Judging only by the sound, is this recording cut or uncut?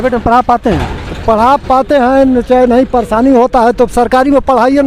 uncut